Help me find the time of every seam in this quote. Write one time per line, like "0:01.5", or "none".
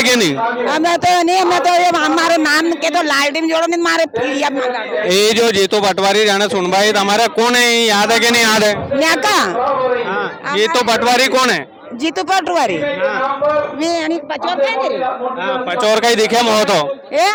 none

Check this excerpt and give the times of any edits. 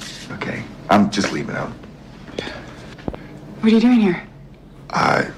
0:02.8

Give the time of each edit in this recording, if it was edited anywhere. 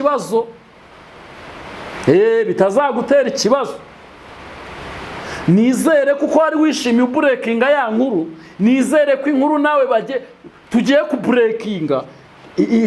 none

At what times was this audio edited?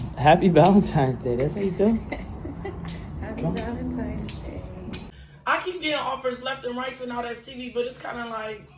0:05.3

